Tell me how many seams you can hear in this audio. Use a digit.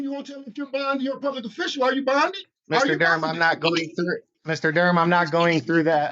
2